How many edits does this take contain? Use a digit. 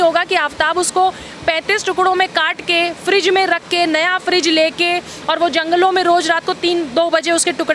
0